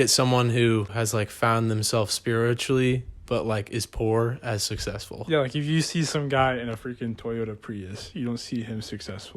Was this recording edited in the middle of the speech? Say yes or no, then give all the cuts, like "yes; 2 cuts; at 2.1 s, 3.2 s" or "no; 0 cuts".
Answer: yes; 1 cut; at 0.9 s